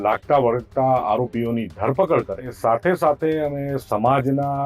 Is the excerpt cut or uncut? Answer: cut